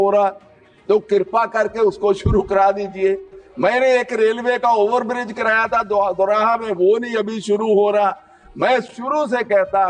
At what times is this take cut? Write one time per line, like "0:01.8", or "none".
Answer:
none